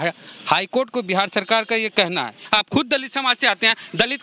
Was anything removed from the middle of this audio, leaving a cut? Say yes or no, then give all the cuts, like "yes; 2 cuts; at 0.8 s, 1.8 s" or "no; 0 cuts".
yes; 1 cut; at 2.4 s